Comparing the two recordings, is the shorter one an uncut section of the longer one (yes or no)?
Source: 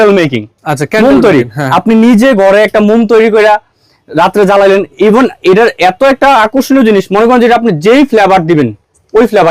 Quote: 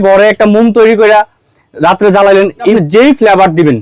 no